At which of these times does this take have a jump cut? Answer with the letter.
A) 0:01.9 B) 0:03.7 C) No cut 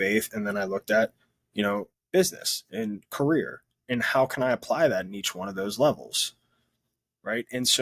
A